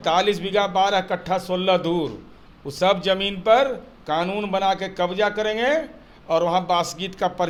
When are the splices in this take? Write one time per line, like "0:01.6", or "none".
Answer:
none

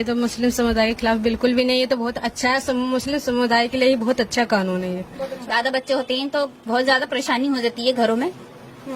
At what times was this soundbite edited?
0:05.3

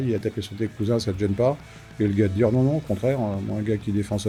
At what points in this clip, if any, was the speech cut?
none

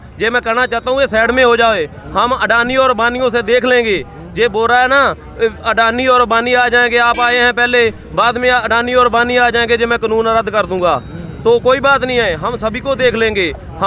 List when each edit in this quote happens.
none

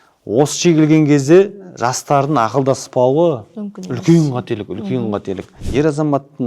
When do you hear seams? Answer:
0:05.5

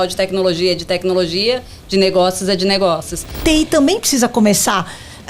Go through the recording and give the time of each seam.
0:03.3

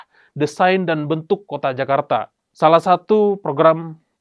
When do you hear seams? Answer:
0:02.4

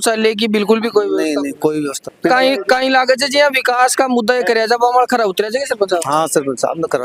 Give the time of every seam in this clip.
none

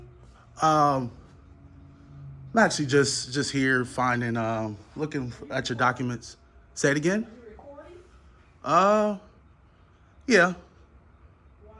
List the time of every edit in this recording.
none

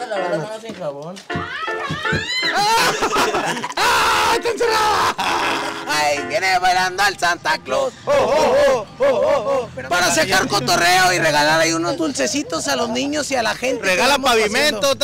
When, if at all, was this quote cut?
0:05.8
0:09.8

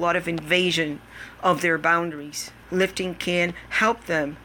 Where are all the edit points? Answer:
0:02.5

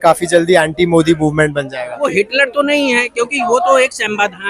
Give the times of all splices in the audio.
0:02.0

